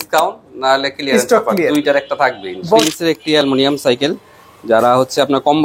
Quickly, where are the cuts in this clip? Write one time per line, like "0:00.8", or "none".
0:02.9